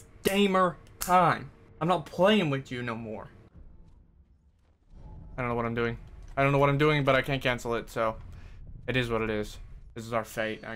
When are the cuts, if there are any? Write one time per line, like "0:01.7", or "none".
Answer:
0:03.4